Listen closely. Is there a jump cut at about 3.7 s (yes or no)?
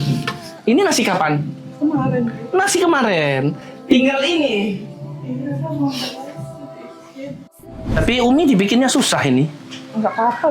yes